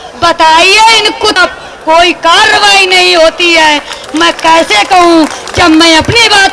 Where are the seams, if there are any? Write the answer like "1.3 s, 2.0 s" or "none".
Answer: 1.4 s